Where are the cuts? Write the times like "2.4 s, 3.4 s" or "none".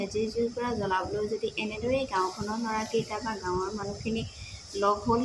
none